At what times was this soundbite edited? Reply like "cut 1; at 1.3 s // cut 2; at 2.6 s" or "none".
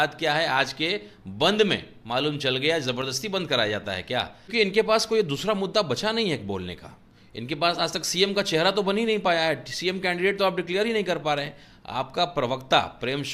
cut 1; at 4.5 s